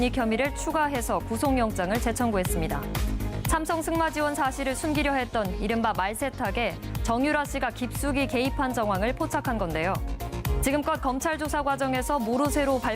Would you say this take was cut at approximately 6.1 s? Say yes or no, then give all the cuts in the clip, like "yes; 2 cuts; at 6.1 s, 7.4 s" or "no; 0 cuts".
yes; 1 cut; at 6.1 s